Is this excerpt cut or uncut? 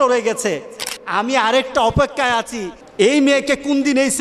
uncut